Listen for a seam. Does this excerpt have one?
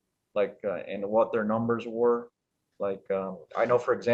no; 0 cuts

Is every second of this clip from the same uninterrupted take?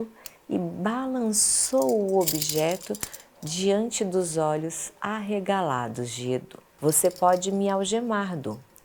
no; 1 cut; at 6.6 s

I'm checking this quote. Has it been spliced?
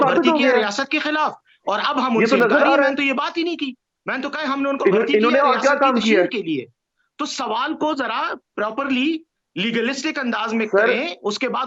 no; 0 cuts

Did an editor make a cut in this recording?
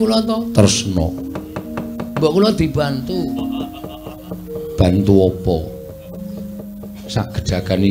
no; 0 cuts

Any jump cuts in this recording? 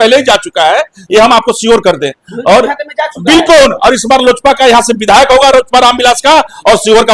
no; 0 cuts

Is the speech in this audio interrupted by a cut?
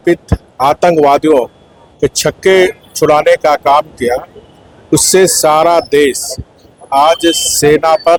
no; 0 cuts

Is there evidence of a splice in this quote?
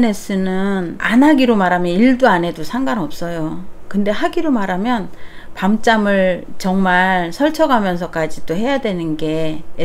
yes; 1 cut; at 1.0 s

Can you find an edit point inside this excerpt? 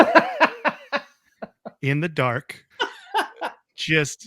yes; 1 cut; at 2.6 s

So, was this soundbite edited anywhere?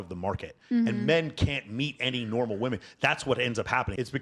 no; 0 cuts

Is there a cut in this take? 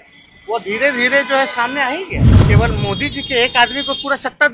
yes; 1 cut; at 2.3 s

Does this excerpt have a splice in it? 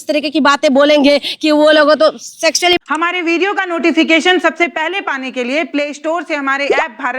yes; 1 cut; at 2.8 s

